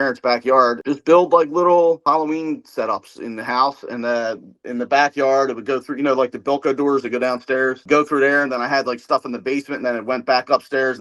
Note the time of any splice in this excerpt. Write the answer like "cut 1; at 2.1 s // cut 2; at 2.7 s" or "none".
cut 1; at 0.8 s // cut 2; at 2.0 s